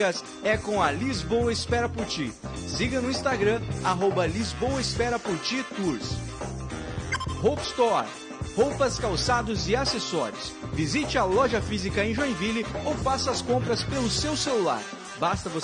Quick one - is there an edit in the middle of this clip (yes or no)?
no